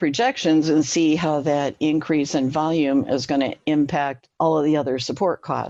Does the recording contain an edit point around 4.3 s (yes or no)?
no